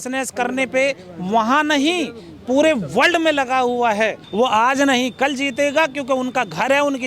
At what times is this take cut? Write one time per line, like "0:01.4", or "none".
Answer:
0:04.2